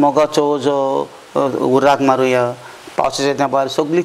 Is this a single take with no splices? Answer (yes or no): yes